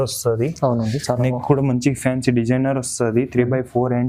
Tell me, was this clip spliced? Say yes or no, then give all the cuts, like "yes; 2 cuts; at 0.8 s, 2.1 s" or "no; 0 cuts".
no; 0 cuts